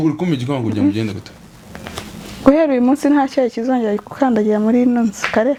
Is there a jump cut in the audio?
no; 0 cuts

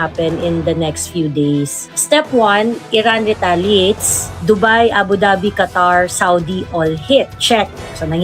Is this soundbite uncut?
no; 1 cut; at 1.8 s

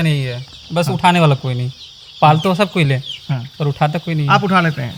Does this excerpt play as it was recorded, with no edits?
yes; 0 cuts

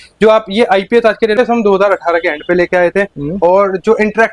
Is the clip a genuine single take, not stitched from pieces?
no; 1 cut; at 1.4 s

